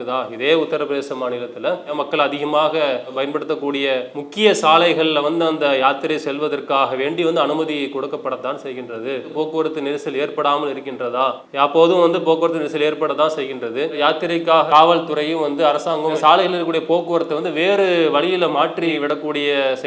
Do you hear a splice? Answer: yes; 5 cuts; at 1.9 s, 4.2 s, 9.3 s, 11.4 s, 14.0 s

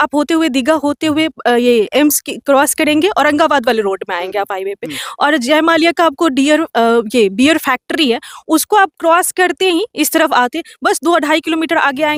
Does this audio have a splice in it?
no; 0 cuts

